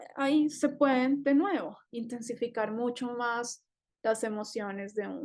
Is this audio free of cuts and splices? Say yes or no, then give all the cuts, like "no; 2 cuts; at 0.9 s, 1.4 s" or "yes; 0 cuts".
yes; 0 cuts